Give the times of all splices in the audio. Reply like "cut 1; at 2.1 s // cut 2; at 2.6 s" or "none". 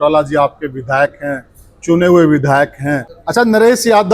cut 1; at 3.1 s